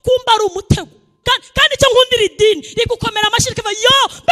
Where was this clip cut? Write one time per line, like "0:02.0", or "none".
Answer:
0:01.1